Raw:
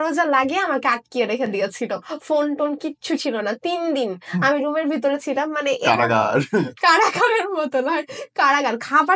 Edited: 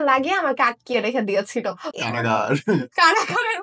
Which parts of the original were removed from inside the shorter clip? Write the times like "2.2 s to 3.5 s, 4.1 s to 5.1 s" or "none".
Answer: 2.2 s to 5.8 s